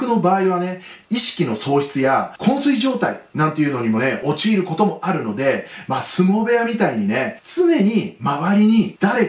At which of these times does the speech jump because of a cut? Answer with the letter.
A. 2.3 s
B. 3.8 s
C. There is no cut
A